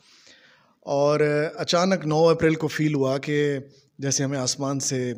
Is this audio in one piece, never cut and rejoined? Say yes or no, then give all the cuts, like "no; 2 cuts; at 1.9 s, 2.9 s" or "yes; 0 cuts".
yes; 0 cuts